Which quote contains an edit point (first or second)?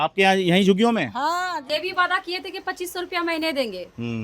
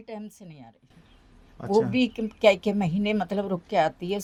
first